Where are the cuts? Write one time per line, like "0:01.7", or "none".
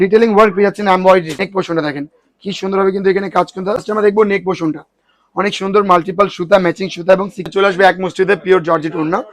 0:01.3
0:03.8
0:07.4